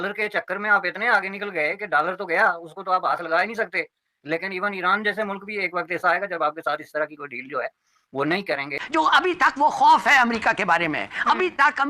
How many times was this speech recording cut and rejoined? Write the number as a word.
one